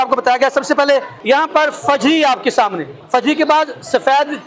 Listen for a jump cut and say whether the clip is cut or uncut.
cut